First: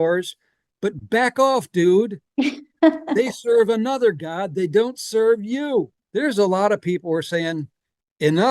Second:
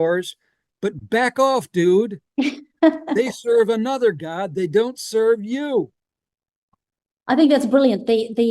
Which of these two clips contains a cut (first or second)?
first